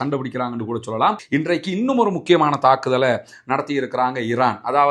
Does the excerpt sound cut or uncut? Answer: cut